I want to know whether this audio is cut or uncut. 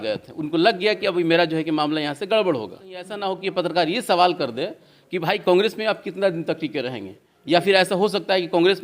cut